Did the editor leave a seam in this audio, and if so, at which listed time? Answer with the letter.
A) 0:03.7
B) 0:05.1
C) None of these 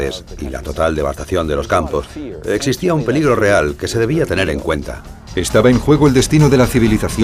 C